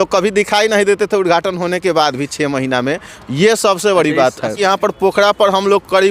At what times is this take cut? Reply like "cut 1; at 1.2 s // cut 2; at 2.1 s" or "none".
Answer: cut 1; at 4.6 s